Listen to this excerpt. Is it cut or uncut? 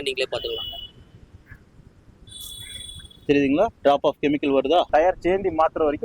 cut